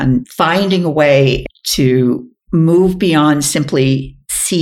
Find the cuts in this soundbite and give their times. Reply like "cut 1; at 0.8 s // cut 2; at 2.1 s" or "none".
cut 1; at 1.4 s